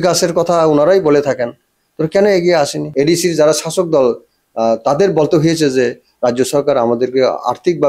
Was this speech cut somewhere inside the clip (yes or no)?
yes